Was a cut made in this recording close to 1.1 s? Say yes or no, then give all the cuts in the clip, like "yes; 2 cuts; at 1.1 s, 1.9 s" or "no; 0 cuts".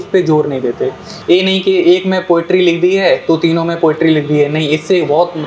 yes; 1 cut; at 1.1 s